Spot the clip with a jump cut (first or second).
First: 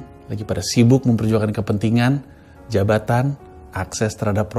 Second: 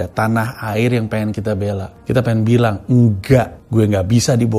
second